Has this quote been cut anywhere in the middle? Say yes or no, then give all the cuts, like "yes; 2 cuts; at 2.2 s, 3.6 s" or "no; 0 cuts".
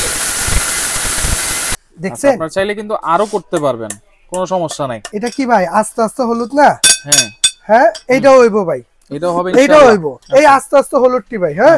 yes; 3 cuts; at 1.8 s, 5.0 s, 10.1 s